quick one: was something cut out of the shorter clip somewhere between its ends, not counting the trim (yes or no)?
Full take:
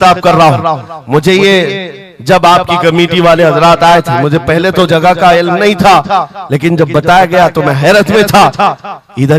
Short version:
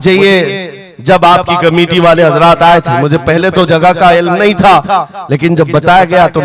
no